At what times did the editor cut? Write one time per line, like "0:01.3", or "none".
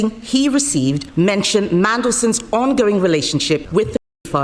0:01.0
0:03.7